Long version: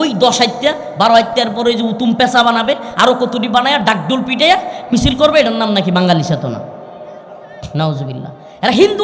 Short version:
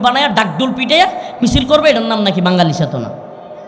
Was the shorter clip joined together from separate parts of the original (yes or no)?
no